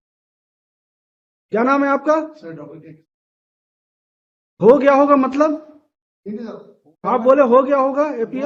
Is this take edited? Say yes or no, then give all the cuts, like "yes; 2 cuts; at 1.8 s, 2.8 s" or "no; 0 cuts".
no; 0 cuts